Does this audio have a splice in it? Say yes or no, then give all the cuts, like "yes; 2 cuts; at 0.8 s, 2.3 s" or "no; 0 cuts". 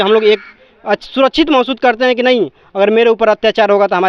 no; 0 cuts